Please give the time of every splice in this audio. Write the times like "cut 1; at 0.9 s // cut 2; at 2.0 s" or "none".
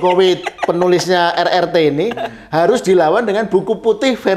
none